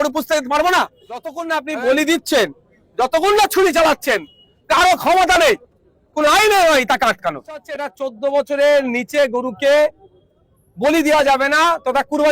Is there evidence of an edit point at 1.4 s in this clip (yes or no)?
yes